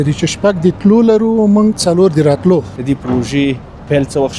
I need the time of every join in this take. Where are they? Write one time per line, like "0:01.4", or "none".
0:02.7